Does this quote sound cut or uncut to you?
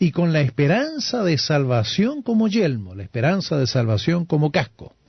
uncut